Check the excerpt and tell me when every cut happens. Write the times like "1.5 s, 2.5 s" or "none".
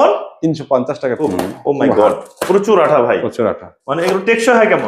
1.2 s